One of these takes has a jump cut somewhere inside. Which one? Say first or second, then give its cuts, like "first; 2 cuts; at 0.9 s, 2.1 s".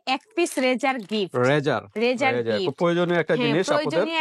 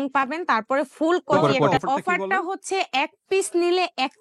second; 1 cut; at 1.7 s